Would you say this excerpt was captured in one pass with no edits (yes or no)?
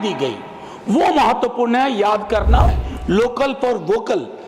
no